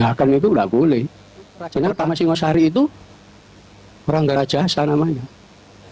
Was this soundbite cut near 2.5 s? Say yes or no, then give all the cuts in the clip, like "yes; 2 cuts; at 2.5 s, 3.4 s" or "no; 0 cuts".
yes; 1 cut; at 2.5 s